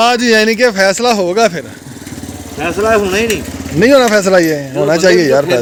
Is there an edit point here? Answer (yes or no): no